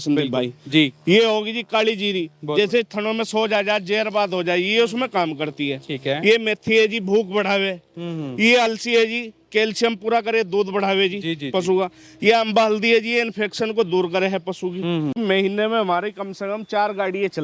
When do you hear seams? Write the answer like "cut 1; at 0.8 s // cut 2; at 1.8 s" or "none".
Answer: cut 1; at 15.2 s

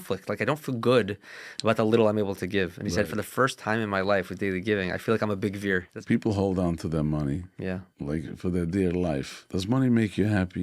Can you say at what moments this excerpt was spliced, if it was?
cut 1; at 5.9 s // cut 2; at 7.9 s // cut 3; at 9.4 s

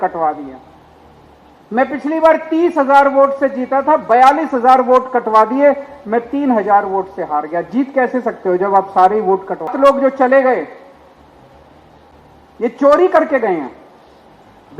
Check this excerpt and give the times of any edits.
cut 1; at 9.7 s

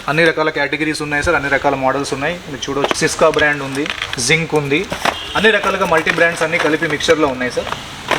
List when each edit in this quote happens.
cut 1; at 3.0 s // cut 2; at 4.0 s // cut 3; at 4.9 s

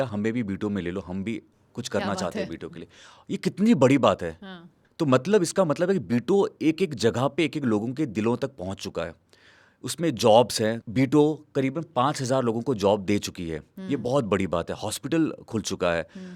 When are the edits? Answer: none

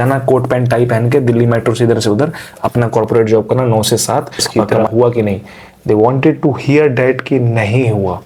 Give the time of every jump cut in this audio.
cut 1; at 4.7 s

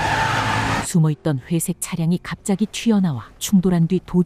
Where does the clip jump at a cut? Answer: cut 1; at 3.3 s

